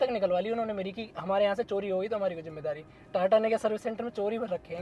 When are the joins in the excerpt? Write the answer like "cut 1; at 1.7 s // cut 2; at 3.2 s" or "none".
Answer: none